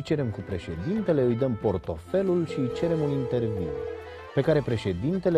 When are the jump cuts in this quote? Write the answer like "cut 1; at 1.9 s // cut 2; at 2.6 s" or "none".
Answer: cut 1; at 1.0 s